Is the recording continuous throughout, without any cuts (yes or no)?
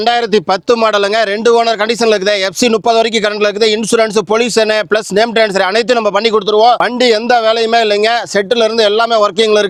yes